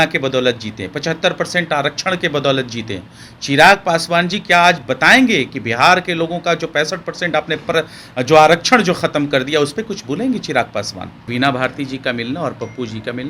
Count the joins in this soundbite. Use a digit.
1